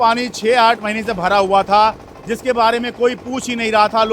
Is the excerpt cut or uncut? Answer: uncut